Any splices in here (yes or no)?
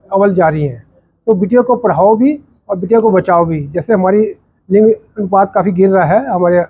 no